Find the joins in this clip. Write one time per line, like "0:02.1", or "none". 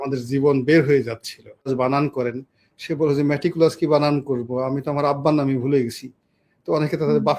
0:01.7